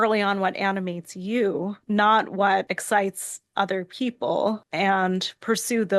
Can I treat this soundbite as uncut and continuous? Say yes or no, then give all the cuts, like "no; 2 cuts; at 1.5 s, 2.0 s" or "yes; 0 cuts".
no; 3 cuts; at 1.8 s, 2.8 s, 4.7 s